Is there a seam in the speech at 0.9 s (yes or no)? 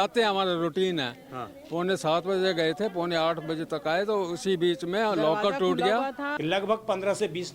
no